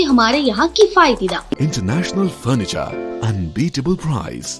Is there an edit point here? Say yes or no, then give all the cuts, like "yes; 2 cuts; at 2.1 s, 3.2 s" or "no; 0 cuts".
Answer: yes; 1 cut; at 1.6 s